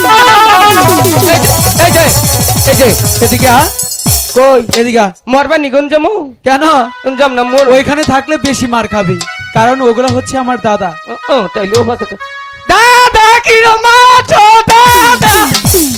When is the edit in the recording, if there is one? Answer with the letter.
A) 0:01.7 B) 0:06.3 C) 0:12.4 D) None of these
D